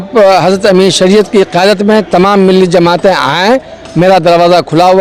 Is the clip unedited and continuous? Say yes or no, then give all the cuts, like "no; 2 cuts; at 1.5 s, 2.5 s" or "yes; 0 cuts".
yes; 0 cuts